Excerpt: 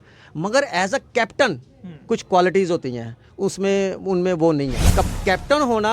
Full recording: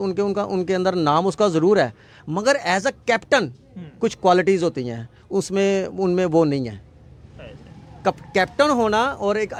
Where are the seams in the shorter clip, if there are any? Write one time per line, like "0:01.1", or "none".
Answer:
0:04.8